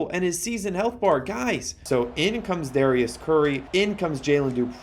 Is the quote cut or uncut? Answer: cut